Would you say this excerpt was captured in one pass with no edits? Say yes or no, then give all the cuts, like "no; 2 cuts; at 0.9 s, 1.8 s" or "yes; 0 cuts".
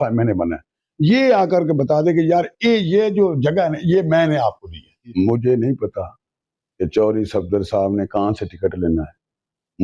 no; 1 cut; at 5.0 s